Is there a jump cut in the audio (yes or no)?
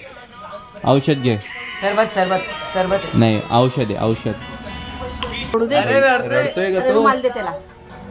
yes